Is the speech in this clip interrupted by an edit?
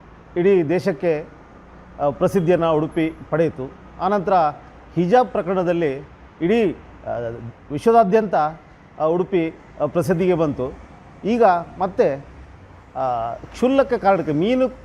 no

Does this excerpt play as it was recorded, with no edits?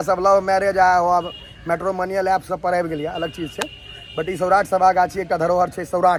yes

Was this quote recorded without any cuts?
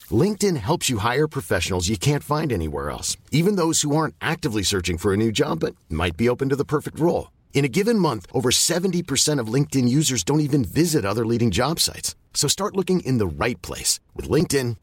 yes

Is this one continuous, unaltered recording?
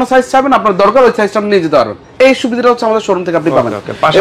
yes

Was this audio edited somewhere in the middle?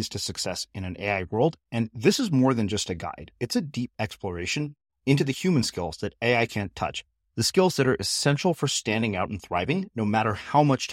no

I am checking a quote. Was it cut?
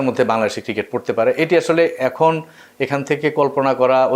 no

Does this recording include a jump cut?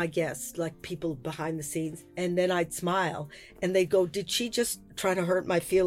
yes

